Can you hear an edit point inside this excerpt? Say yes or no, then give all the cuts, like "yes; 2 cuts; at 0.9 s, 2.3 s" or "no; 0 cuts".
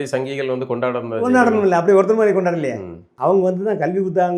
yes; 1 cut; at 3.0 s